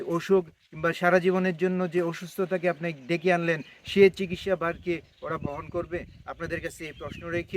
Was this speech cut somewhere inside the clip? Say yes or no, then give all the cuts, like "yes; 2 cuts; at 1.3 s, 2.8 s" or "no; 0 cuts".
no; 0 cuts